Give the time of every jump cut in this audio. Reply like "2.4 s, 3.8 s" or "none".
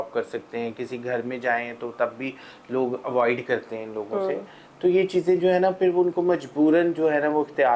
none